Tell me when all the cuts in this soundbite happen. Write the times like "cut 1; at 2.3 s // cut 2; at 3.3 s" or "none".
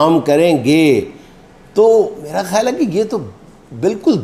none